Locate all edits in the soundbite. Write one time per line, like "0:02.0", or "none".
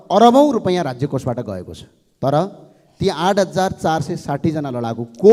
none